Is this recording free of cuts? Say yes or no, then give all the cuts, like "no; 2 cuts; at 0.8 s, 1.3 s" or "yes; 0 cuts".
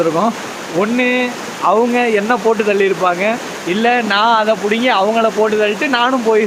yes; 0 cuts